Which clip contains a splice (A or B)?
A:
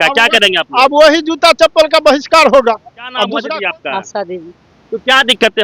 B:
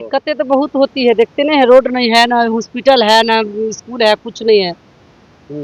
A